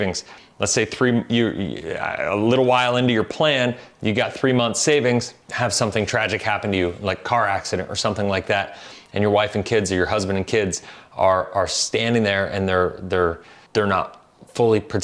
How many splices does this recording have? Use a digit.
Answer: 2